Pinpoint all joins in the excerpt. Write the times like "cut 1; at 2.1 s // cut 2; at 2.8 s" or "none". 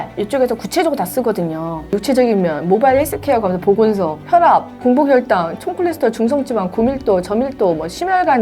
cut 1; at 2.0 s // cut 2; at 4.5 s